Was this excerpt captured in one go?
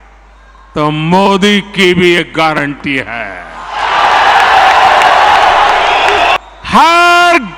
no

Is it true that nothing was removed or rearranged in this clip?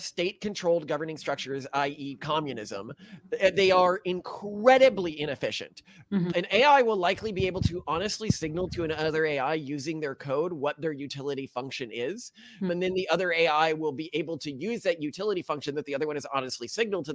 no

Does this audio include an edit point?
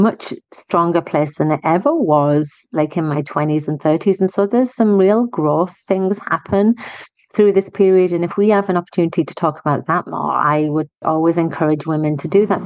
yes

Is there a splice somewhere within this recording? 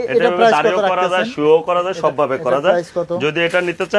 no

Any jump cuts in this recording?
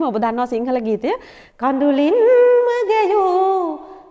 no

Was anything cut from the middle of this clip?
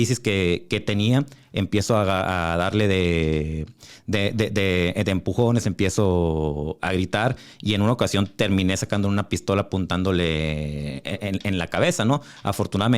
no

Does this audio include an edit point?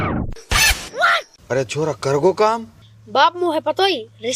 no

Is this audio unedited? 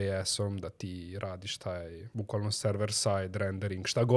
no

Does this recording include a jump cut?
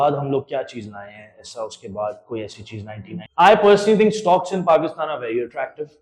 yes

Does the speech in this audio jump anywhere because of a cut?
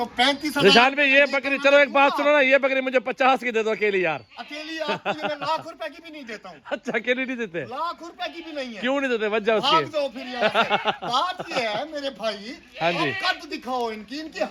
no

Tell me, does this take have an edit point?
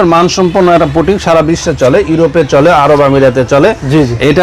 no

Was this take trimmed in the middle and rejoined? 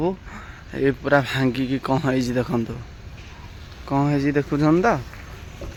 no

